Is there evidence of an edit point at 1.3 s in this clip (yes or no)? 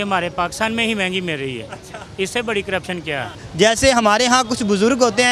no